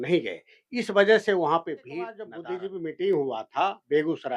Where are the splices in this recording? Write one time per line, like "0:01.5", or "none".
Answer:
0:02.4